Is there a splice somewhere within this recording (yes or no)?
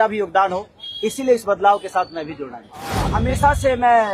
yes